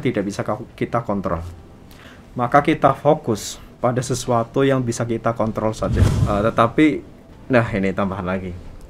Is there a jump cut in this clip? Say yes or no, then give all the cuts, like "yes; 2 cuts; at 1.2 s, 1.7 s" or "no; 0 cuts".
yes; 1 cut; at 6.1 s